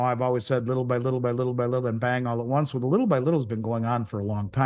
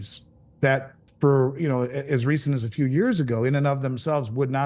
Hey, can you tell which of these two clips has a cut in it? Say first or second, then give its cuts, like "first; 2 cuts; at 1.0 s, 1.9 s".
second; 1 cut; at 1.0 s